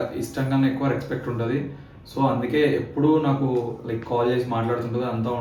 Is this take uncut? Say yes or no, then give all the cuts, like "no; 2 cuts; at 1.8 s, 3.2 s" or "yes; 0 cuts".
yes; 0 cuts